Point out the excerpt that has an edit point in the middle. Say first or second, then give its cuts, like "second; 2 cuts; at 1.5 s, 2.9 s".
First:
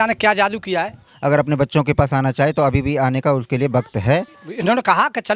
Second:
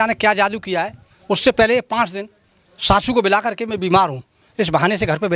first; 2 cuts; at 1.1 s, 4.4 s